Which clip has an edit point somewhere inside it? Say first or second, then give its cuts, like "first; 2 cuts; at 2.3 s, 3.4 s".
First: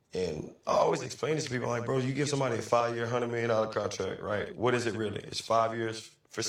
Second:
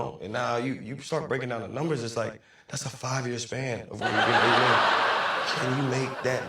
second; 2 cuts; at 3.9 s, 5.6 s